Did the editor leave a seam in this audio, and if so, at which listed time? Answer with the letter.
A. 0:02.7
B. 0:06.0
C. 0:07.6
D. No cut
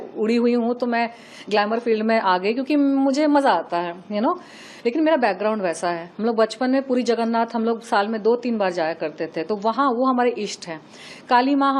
D